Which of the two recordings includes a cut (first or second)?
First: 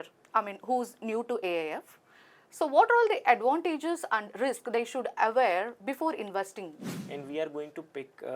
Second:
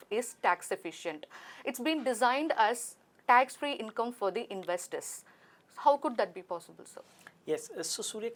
first